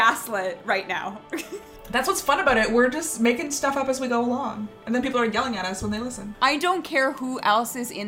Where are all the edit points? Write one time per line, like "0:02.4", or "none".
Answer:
0:01.8
0:06.2